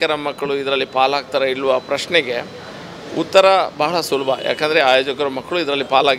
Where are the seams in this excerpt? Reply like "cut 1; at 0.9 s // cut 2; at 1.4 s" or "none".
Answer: none